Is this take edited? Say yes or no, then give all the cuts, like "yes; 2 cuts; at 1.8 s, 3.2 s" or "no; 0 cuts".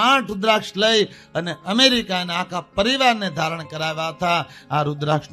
no; 0 cuts